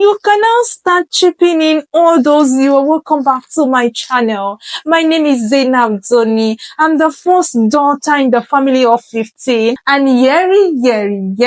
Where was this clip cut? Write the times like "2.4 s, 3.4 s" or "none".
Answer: 9.8 s